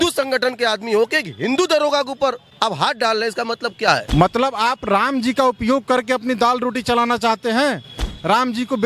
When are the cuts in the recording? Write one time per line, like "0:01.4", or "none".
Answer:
0:02.5
0:04.1